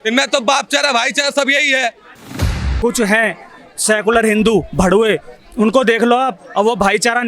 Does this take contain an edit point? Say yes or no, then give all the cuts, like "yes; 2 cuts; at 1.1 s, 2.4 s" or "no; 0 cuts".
yes; 1 cut; at 2.5 s